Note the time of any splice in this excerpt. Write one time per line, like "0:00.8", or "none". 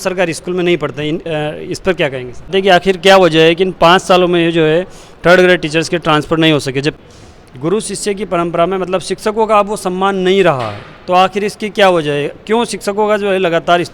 0:02.5
0:07.0